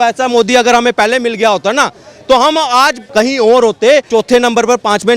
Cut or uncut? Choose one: cut